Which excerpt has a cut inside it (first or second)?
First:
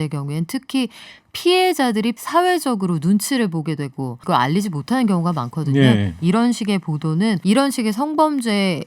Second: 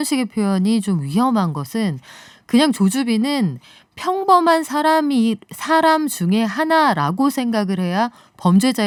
first